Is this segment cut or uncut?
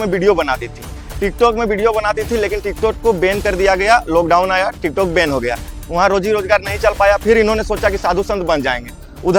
uncut